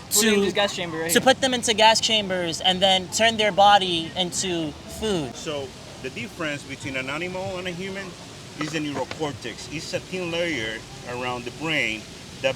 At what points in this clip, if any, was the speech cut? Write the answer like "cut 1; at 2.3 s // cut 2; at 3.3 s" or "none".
cut 1; at 5.4 s